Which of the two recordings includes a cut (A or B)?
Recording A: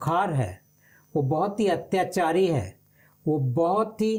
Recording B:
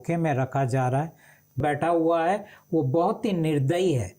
B